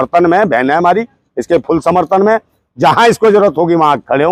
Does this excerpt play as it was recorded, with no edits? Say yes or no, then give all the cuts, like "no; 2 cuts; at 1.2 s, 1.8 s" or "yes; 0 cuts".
yes; 0 cuts